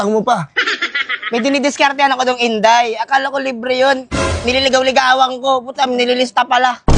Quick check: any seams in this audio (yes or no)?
no